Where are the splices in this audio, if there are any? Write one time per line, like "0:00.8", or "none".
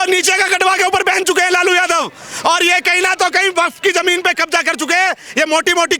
none